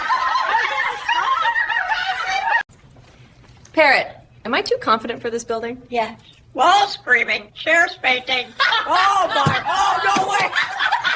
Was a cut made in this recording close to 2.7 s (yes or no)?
yes